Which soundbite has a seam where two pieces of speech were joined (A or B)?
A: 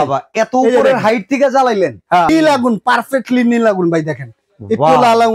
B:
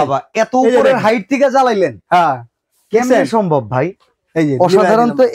A